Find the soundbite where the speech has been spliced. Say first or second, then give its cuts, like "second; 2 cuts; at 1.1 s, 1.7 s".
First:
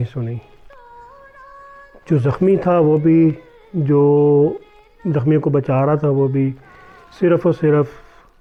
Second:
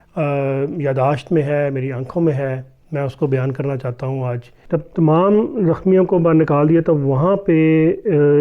second; 1 cut; at 4.5 s